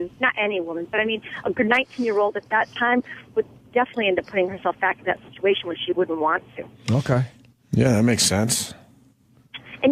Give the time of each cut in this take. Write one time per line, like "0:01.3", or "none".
0:08.2